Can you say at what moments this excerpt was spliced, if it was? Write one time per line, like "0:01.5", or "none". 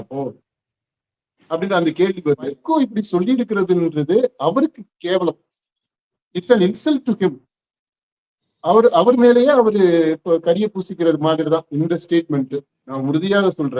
0:02.6
0:12.8